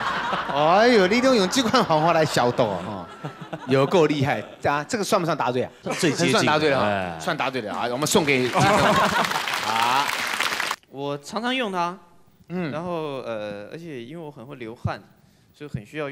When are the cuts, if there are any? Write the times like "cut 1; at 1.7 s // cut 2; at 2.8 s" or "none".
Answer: cut 1; at 10.7 s